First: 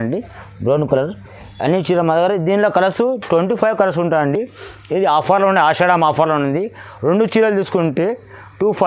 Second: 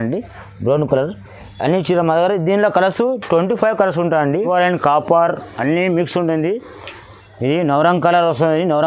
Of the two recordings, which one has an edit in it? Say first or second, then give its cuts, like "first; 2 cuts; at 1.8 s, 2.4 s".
second; 1 cut; at 4.5 s